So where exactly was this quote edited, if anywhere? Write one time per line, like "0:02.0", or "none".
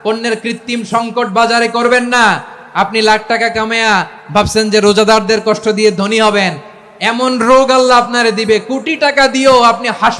none

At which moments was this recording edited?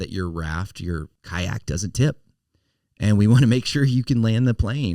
0:01.2

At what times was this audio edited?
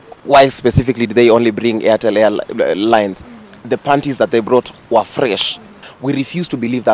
0:05.8

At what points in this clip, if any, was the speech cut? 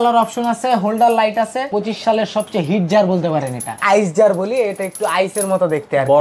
0:01.7
0:03.8

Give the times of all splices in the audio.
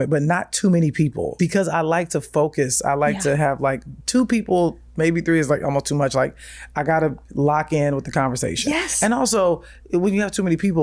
0:01.3

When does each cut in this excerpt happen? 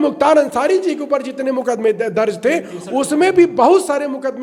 none

